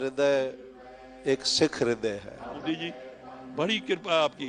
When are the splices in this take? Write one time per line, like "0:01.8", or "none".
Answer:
0:02.6